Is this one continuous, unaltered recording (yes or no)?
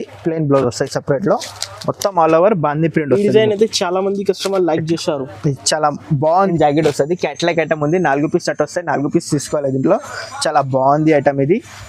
no